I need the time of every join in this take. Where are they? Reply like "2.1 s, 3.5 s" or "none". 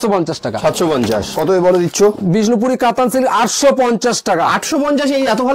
1.3 s